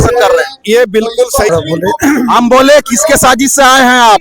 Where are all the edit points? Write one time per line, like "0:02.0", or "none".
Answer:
0:01.5